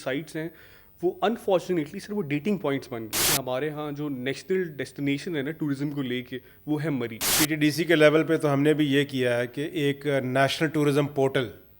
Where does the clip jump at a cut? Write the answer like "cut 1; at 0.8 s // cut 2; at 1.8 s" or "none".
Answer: cut 1; at 3.3 s // cut 2; at 7.3 s